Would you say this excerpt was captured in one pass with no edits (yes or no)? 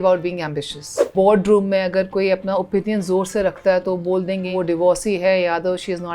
no